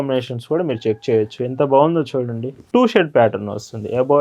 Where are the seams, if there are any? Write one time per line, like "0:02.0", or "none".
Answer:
0:02.6